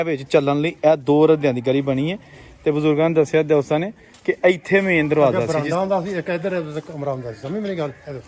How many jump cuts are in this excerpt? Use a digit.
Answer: 1